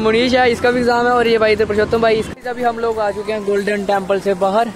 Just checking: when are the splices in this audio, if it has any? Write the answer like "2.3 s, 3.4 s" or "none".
2.3 s

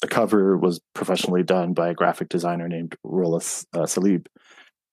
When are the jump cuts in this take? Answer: none

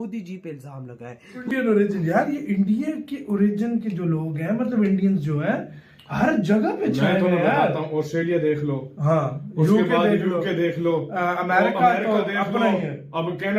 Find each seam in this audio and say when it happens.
1.4 s

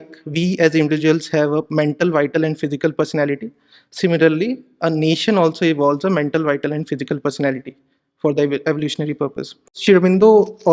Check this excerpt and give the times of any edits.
9.7 s

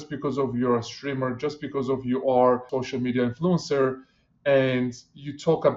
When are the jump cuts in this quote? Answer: 2.7 s

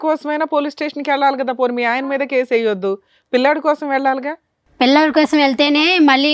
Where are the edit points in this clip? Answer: none

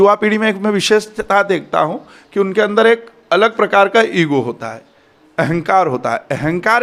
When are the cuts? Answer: none

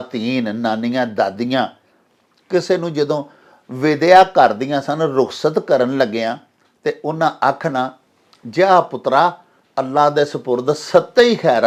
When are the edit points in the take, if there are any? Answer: none

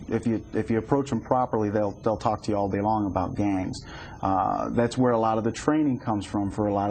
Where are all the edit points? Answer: 1.8 s

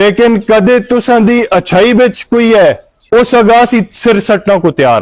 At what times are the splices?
2.9 s

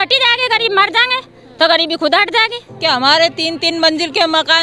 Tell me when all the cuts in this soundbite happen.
2.6 s

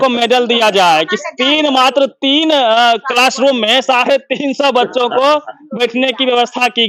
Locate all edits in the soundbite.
none

